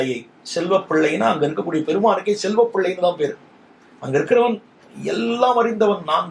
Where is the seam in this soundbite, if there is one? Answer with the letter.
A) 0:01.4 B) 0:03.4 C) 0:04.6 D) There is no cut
D